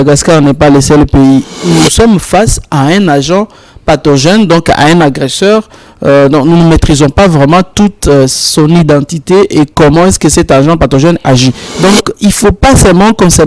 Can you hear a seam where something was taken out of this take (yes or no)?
yes